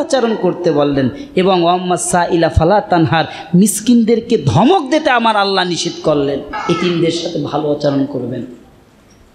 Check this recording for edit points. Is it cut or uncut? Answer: cut